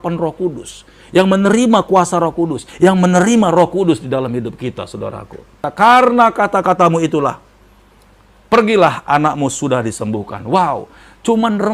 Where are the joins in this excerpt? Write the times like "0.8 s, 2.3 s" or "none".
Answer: 5.7 s